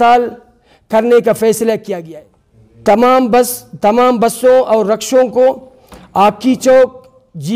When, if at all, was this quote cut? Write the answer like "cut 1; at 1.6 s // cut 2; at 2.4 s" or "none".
cut 1; at 2.0 s